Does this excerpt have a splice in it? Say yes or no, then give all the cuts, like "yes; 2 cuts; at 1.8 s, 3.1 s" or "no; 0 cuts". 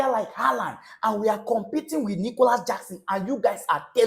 no; 0 cuts